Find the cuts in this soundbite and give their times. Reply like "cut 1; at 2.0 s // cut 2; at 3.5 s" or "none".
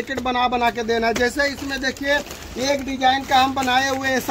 none